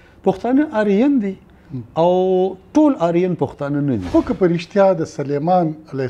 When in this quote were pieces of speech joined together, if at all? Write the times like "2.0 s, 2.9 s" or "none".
4.0 s